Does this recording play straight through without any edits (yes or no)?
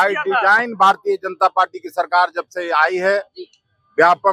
yes